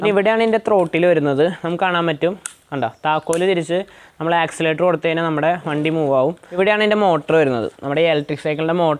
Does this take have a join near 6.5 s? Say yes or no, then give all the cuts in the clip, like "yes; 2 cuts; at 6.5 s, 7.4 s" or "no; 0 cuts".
yes; 1 cut; at 6.5 s